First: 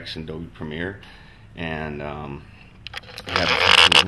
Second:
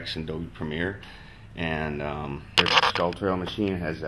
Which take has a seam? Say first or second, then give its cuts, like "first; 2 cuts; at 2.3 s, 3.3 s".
second; 1 cut; at 2.6 s